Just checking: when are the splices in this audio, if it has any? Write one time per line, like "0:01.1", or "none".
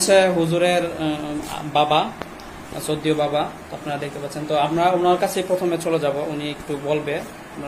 none